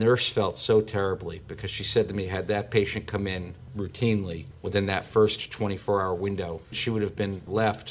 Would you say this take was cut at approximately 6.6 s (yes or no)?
yes